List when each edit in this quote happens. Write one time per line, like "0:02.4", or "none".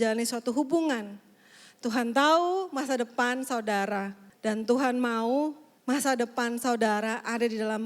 0:04.2
0:05.7